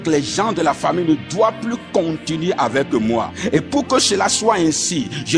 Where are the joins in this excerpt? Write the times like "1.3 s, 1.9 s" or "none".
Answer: 3.4 s